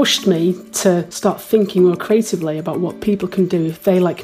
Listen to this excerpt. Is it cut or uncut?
cut